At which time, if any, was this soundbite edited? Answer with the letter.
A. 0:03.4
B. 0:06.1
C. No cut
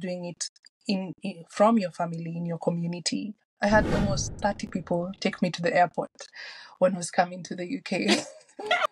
A